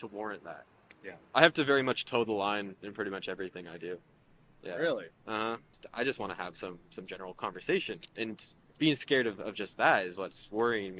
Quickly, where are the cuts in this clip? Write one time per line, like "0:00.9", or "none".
0:01.2
0:05.8